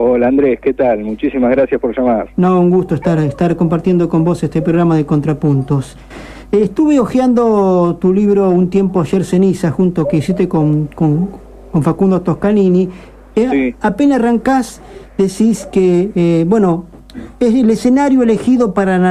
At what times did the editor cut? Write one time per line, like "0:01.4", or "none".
0:05.1